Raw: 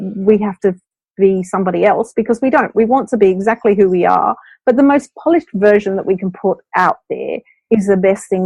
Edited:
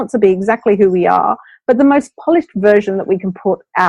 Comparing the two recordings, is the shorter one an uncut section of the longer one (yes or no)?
yes